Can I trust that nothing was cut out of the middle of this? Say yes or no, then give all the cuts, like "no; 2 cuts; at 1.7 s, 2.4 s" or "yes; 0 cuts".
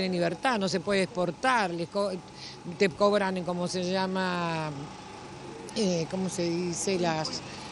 yes; 0 cuts